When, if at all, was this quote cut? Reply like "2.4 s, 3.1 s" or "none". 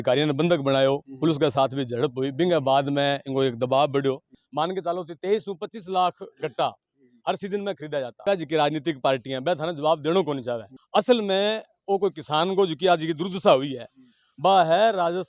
4.4 s, 8.2 s

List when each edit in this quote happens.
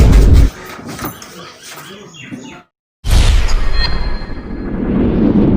2.6 s

